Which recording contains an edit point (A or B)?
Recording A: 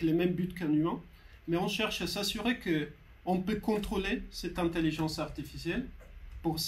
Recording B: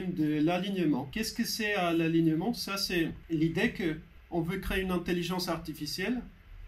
B